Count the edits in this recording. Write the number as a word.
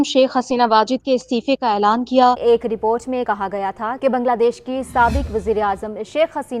one